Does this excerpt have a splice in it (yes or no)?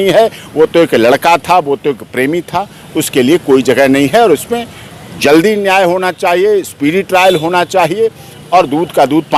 no